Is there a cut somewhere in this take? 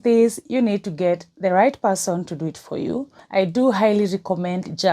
yes; 1 cut; at 3.1 s

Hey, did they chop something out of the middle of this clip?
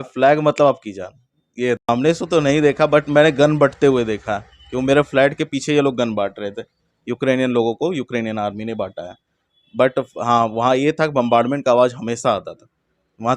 yes; 1 cut; at 1.9 s

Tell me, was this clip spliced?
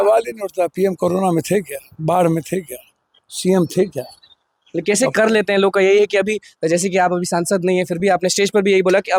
no; 0 cuts

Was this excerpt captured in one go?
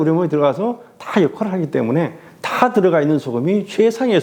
yes; 0 cuts

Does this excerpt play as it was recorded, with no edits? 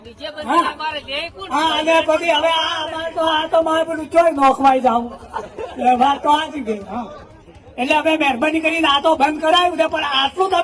yes; 0 cuts

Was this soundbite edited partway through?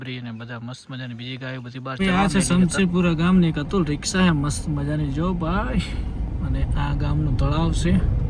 yes; 1 cut; at 2.0 s

